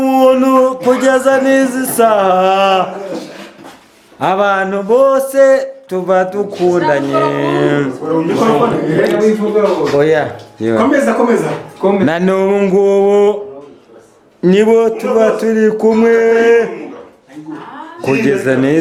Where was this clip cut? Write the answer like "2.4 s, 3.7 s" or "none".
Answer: none